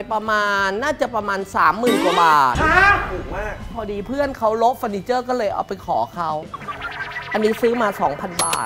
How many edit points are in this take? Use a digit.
2